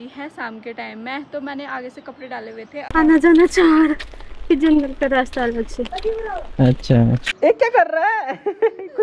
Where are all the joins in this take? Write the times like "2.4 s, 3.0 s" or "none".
2.8 s, 7.3 s

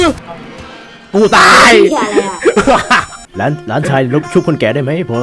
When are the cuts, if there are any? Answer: 3.2 s

